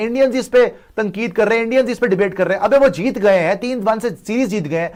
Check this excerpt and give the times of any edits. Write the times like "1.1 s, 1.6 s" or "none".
none